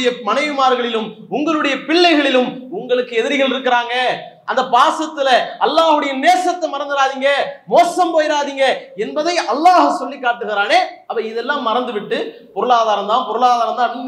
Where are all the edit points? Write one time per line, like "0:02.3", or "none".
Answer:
0:11.0